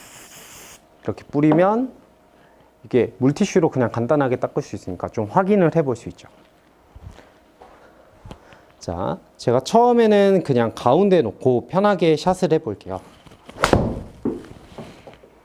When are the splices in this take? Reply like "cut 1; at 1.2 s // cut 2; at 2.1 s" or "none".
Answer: none